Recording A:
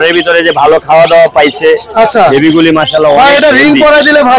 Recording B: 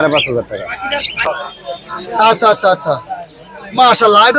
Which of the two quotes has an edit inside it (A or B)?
B